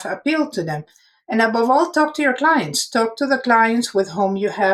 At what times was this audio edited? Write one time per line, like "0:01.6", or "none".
none